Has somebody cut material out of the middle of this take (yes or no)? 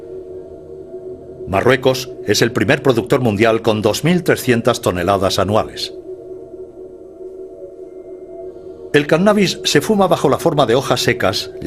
yes